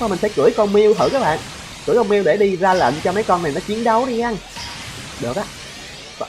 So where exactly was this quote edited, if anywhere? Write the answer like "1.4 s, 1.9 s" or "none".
none